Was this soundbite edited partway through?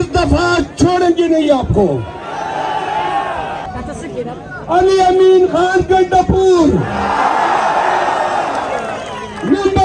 yes; 1 cut; at 3.7 s

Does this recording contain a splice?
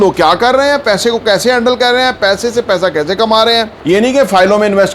yes; 1 cut; at 3.7 s

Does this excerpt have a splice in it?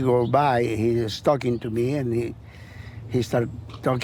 no; 0 cuts

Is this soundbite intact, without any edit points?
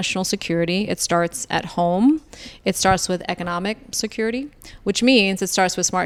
yes; 0 cuts

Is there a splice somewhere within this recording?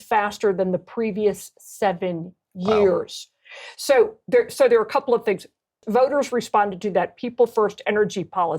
yes; 1 cut; at 5.8 s

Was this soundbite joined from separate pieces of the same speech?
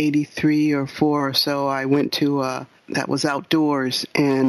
yes; 1 cut; at 2.7 s

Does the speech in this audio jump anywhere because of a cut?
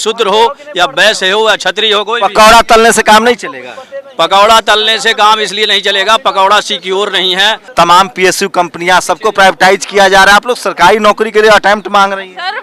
yes; 1 cut; at 7.6 s

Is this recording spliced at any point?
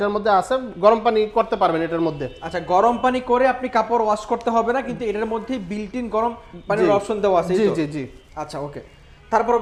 no; 0 cuts

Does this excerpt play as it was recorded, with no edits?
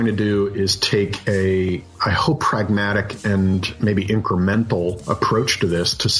no; 1 cut; at 1.9 s

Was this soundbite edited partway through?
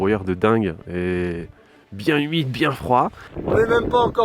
yes; 1 cut; at 3.3 s

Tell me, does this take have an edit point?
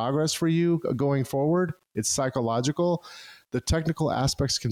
no; 0 cuts

